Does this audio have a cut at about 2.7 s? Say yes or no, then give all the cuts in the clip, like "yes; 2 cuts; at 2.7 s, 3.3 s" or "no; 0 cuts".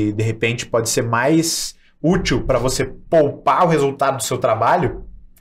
no; 0 cuts